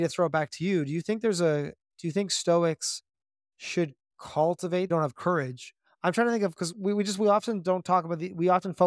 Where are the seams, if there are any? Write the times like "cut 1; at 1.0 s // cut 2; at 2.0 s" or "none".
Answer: cut 1; at 4.9 s